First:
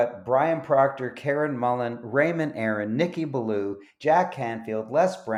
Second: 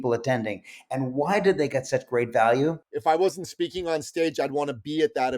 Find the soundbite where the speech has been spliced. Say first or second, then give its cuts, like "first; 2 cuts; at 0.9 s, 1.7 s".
second; 1 cut; at 2.9 s